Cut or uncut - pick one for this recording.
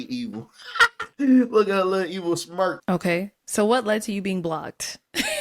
cut